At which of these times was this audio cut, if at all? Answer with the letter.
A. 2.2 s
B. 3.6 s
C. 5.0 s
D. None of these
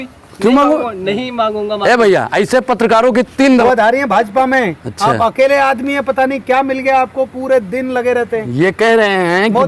B